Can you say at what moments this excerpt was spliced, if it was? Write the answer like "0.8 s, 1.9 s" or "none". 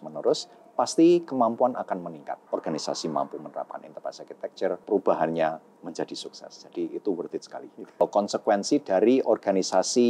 2.4 s, 4.8 s, 8.0 s